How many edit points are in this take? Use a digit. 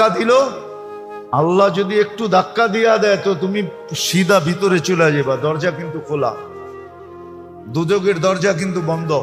0